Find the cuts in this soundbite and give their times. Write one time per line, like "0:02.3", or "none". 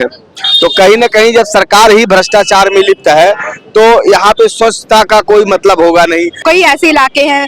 0:06.4